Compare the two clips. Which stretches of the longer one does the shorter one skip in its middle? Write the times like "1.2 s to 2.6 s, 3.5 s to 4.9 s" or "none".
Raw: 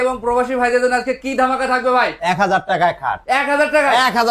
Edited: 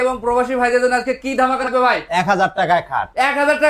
1.7 s to 1.8 s